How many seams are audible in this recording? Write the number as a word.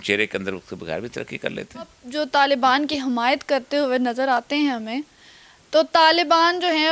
one